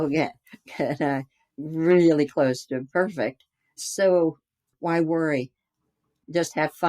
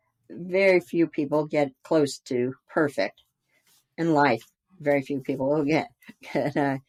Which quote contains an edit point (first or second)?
first